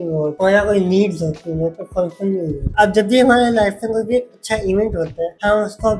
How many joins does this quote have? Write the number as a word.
one